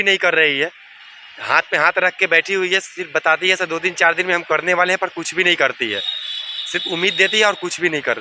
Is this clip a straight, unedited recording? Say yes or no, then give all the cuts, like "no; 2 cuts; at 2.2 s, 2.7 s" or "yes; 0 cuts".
yes; 0 cuts